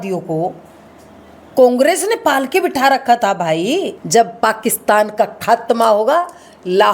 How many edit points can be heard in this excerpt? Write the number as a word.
one